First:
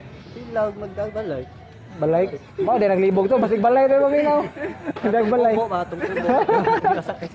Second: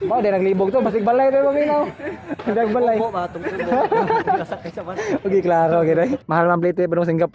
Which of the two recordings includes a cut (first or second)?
second